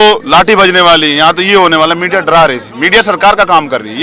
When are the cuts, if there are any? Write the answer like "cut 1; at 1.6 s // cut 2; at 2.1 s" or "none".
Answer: none